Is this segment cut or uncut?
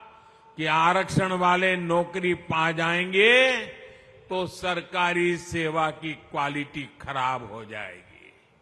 uncut